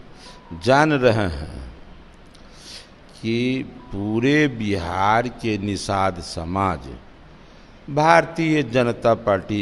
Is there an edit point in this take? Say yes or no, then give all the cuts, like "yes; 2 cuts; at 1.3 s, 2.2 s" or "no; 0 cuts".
no; 0 cuts